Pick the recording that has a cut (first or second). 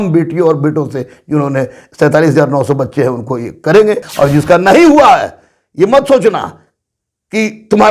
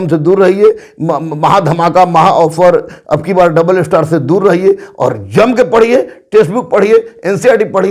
first